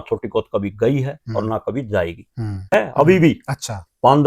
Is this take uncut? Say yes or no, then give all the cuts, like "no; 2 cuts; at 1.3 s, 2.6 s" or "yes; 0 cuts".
no; 1 cut; at 2.7 s